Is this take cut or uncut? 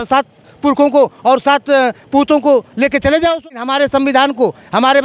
cut